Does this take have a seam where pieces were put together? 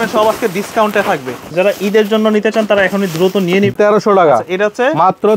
yes; 2 cuts; at 1.5 s, 3.7 s

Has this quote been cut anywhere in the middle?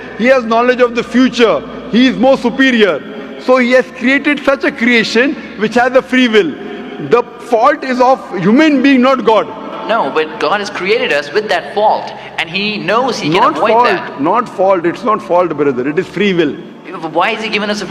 no; 0 cuts

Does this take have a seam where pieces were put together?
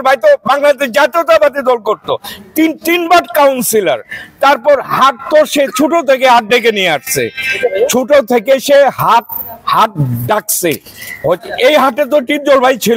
no; 0 cuts

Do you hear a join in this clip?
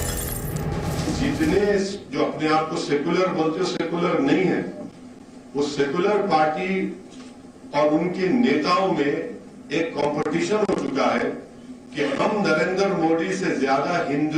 yes; 1 cut; at 1.0 s

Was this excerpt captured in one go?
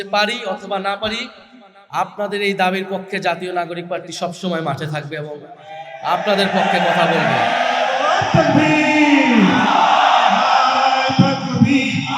yes; 0 cuts

